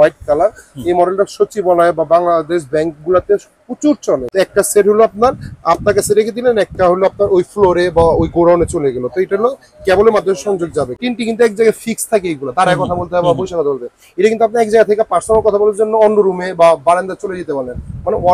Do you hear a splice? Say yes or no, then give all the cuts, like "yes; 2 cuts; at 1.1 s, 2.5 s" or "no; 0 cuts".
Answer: yes; 2 cuts; at 4.3 s, 10.9 s